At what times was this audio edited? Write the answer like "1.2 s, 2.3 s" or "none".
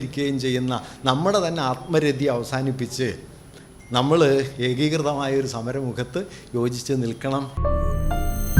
7.5 s